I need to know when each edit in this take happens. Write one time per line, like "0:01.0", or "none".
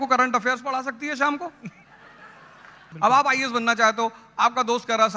0:02.8